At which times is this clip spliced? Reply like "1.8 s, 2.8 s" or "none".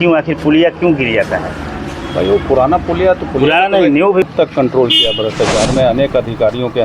4.3 s